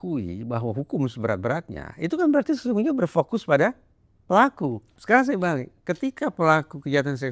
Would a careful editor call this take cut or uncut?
cut